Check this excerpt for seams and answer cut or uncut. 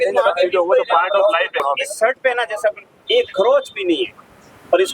cut